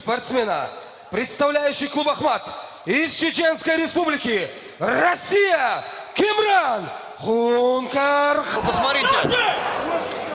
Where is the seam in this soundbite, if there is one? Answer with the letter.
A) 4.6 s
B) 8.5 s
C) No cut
C